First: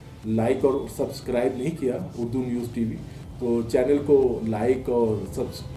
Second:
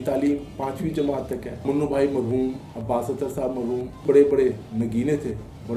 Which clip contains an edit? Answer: second; 2 cuts; at 1.6 s, 4.0 s

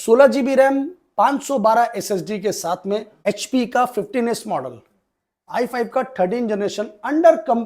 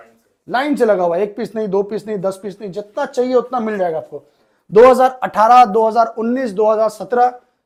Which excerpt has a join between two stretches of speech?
first; 1 cut; at 3.1 s

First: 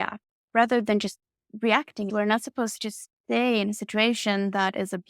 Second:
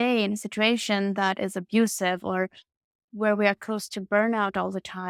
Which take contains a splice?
first; 1 cut; at 2.1 s

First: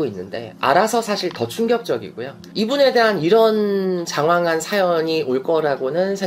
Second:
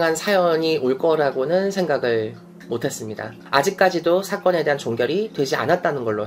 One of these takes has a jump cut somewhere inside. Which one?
second; 1 cut; at 3.5 s

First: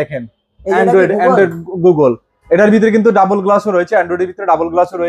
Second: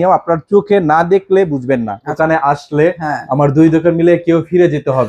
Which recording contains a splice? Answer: second; 1 cut; at 2.1 s

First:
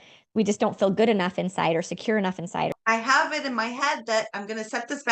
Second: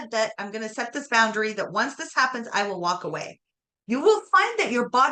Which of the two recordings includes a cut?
first; 1 cut; at 2.7 s

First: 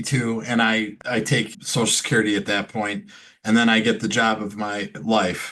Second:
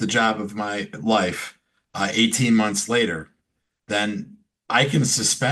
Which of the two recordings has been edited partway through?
first; 1 cut; at 1.3 s

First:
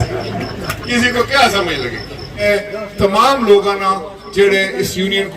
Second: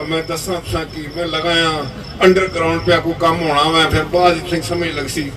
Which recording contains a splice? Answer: first; 1 cut; at 2.4 s

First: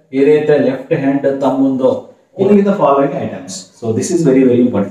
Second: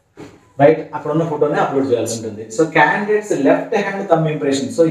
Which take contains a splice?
first; 1 cut; at 2.4 s

